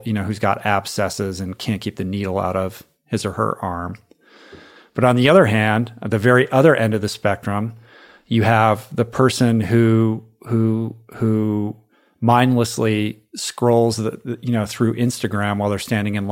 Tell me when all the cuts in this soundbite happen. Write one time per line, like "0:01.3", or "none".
none